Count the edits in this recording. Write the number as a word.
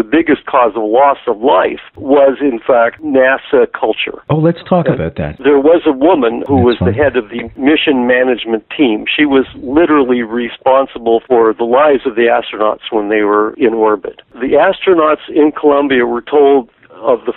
three